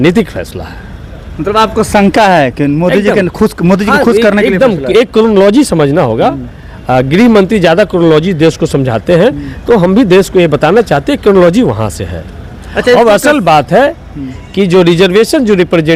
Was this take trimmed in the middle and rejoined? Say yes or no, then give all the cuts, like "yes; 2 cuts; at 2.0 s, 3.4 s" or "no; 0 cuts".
no; 0 cuts